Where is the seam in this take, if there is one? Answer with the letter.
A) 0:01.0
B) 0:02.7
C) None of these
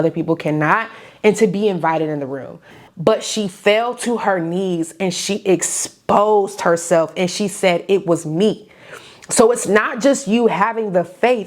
B